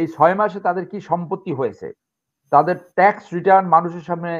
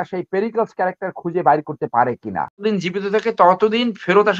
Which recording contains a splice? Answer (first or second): second